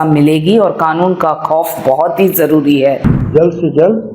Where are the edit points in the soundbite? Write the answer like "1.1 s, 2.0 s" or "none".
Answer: 3.1 s